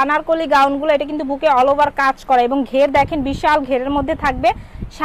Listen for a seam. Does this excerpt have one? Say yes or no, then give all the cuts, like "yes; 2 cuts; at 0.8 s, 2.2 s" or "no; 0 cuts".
no; 0 cuts